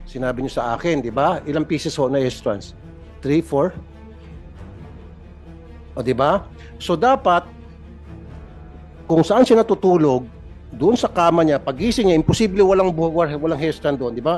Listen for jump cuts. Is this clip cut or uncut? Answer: cut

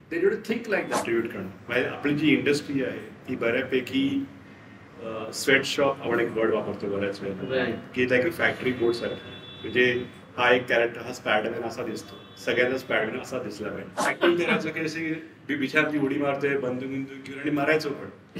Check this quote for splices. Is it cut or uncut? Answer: cut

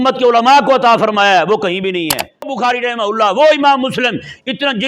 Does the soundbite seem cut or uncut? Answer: cut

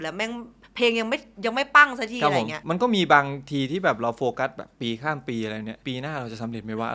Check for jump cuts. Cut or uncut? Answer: cut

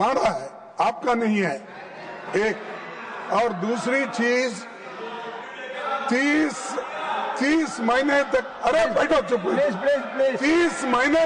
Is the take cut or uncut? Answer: uncut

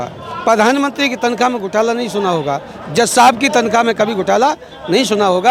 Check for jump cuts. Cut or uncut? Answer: uncut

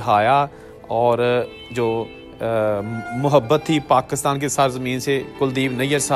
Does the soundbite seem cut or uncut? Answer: uncut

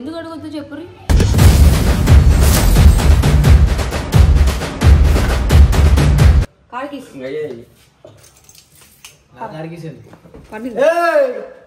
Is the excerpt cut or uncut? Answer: cut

